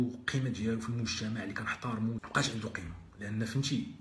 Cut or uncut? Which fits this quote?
cut